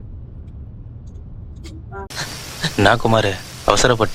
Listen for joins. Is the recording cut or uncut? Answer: cut